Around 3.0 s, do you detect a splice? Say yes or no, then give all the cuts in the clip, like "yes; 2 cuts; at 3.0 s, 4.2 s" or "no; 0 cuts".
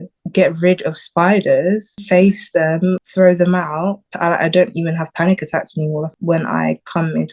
yes; 4 cuts; at 1.9 s, 3.0 s, 4.1 s, 6.1 s